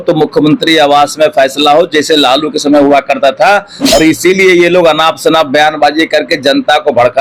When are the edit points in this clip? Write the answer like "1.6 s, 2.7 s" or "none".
none

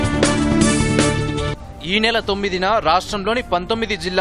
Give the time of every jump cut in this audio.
1.5 s

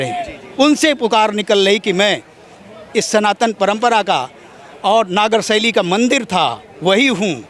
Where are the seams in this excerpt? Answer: none

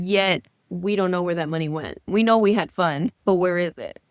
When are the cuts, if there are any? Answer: 2.0 s, 3.2 s

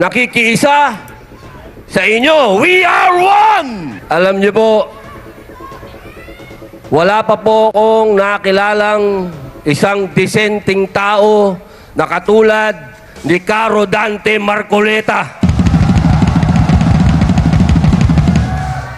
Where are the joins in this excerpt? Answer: 4.0 s

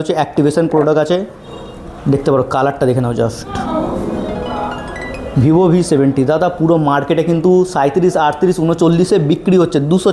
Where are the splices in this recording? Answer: none

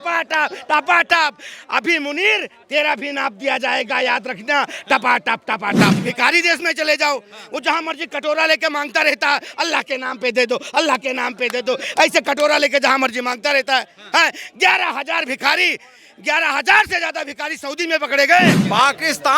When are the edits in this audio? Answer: 6.0 s, 18.6 s

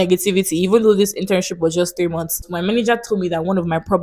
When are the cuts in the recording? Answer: 2.5 s

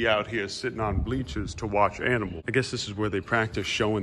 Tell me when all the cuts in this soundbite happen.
none

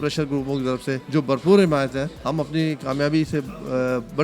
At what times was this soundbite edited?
1.0 s, 2.1 s

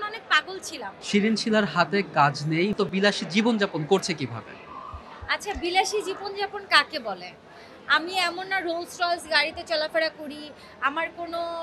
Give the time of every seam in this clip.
none

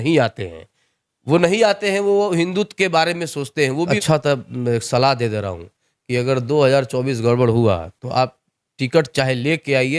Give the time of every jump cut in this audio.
4.0 s

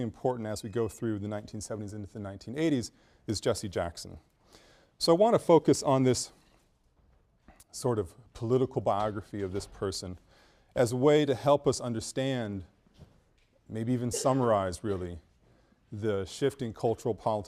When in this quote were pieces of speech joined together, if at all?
2.1 s

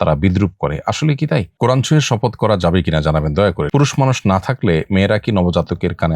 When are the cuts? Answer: 1.5 s, 3.7 s

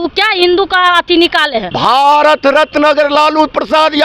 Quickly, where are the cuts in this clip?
1.7 s

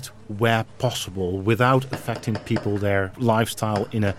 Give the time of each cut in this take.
3.1 s

